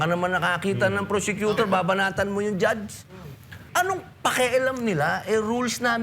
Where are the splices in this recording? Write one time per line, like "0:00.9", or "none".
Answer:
0:03.6

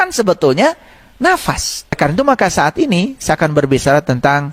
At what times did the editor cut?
0:02.0

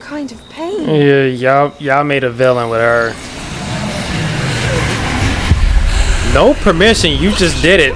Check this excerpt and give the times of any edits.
none

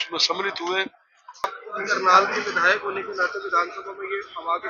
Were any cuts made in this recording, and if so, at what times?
0:01.4

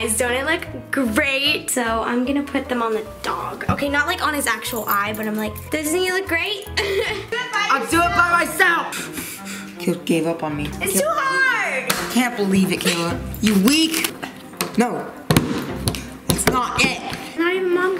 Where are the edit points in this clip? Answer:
0:01.6
0:07.3
0:14.1

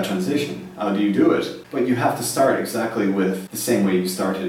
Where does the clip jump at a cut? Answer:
0:01.6
0:03.5

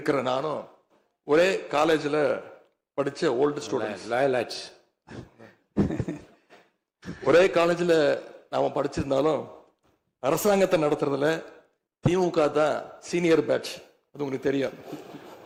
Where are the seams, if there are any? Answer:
none

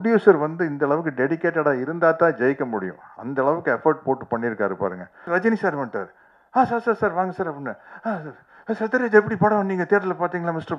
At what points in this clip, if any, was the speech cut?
0:05.3

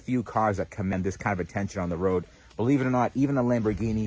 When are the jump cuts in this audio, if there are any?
0:00.9

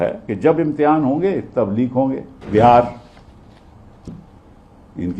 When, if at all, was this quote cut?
0:02.3

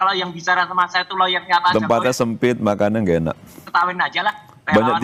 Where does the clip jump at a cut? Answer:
none

